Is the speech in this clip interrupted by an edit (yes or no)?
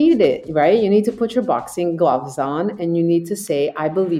no